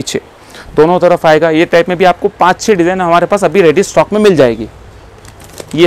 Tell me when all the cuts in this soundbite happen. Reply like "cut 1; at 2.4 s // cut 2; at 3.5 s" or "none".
none